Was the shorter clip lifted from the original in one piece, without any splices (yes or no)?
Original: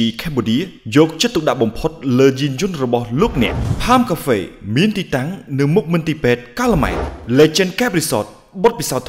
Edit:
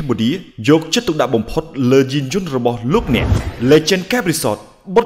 no